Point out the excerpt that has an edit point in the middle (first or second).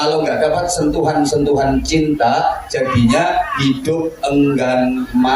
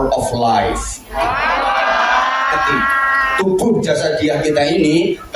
second